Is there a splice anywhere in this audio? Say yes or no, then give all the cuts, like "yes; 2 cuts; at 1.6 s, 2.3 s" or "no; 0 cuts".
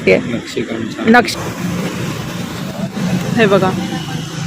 yes; 1 cut; at 1.3 s